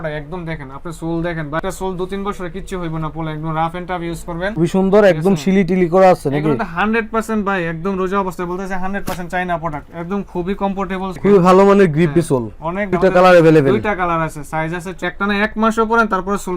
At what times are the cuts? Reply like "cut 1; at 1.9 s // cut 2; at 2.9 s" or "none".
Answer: cut 1; at 4.6 s // cut 2; at 11.2 s // cut 3; at 15.0 s